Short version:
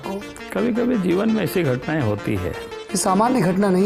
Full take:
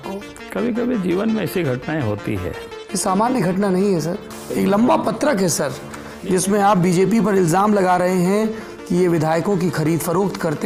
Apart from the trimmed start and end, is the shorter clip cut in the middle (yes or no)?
no